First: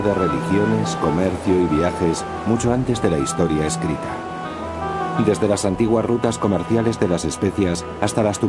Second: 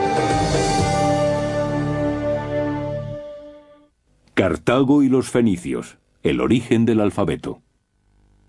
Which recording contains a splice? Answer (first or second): first